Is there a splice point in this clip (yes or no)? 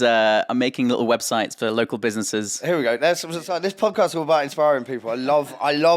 yes